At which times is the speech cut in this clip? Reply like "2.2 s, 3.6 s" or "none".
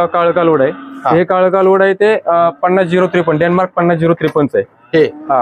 none